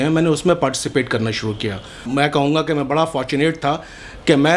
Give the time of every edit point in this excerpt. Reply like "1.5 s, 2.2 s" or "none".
2.0 s